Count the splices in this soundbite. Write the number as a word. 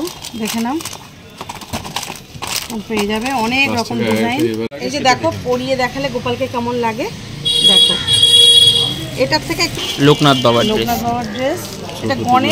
two